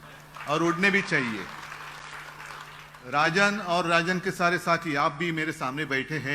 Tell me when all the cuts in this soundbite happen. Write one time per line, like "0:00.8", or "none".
0:03.0